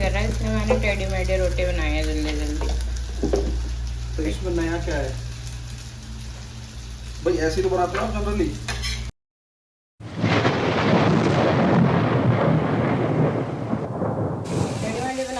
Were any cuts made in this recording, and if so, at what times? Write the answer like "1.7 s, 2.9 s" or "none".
none